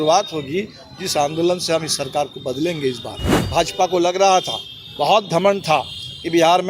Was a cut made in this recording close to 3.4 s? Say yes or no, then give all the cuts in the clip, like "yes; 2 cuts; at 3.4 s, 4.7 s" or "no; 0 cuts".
yes; 1 cut; at 3.4 s